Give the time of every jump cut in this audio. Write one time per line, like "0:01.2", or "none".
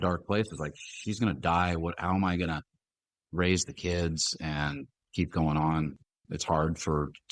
0:06.1